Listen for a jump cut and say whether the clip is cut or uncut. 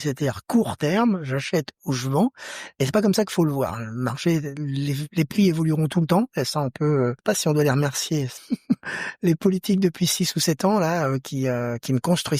cut